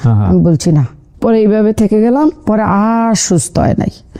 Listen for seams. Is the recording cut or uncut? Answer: uncut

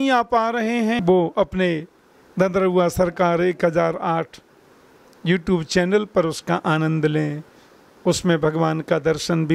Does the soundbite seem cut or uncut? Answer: cut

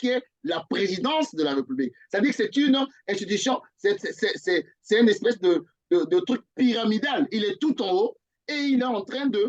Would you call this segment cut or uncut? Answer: uncut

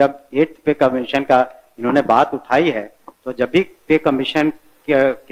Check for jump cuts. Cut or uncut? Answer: uncut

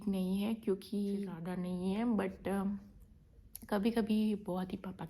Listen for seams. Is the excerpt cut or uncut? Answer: cut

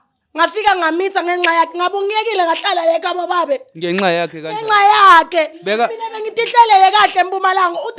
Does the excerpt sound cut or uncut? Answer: uncut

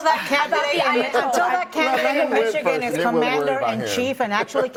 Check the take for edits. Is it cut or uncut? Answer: uncut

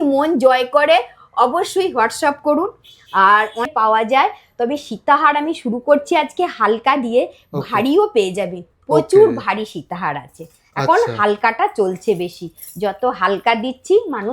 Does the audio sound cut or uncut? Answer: cut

